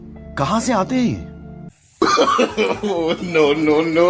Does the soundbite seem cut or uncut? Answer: uncut